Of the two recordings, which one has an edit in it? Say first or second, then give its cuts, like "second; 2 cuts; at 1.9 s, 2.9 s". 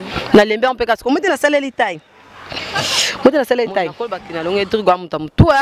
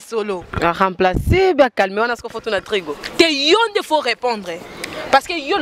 first; 1 cut; at 4.2 s